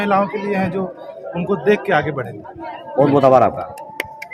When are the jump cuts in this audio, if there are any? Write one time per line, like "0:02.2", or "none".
none

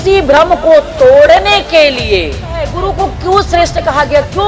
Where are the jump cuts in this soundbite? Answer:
0:02.8

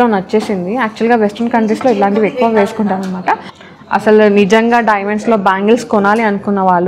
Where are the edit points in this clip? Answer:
0:03.5

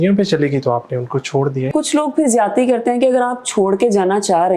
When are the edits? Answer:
0:01.7

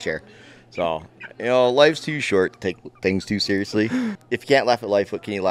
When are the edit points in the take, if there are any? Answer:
0:04.2

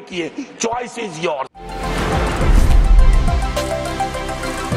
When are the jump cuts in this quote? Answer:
none

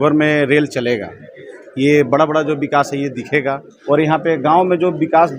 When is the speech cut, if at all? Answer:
0:03.7

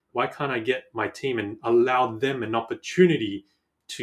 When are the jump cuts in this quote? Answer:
none

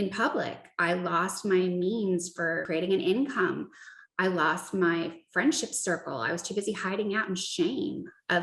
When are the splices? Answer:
0:02.6

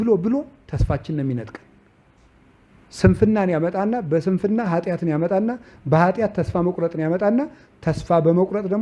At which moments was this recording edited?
none

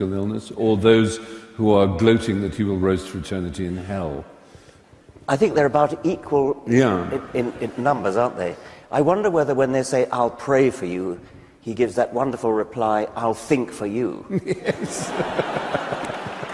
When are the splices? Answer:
none

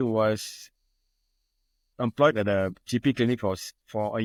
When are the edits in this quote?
none

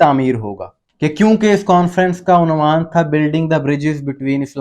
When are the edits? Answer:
none

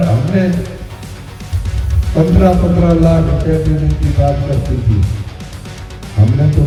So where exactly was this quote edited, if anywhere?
none

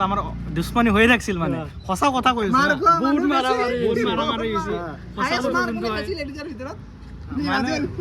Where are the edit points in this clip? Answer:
0:04.9

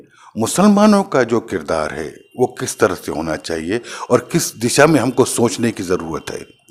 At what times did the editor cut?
none

